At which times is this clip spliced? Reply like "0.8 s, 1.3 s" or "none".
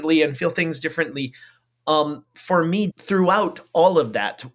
2.9 s